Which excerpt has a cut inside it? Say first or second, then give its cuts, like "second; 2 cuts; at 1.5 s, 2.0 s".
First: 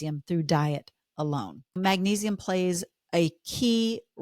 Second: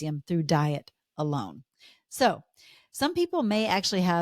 first; 1 cut; at 1.8 s